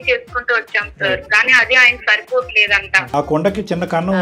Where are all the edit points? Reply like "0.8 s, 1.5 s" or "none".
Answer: 3.1 s